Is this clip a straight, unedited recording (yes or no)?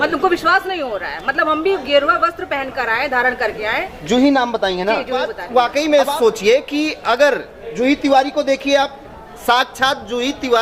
no